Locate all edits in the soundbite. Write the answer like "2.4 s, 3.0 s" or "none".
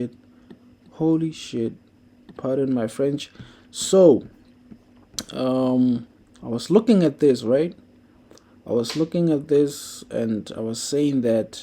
none